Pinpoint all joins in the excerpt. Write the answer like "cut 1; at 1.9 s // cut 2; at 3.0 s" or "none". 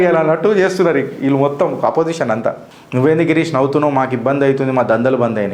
none